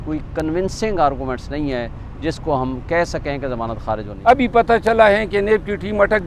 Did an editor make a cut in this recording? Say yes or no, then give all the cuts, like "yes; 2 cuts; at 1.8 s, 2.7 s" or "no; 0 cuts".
yes; 1 cut; at 4.0 s